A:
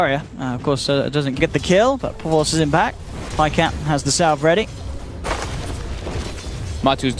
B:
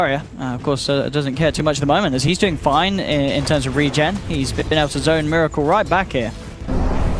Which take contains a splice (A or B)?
B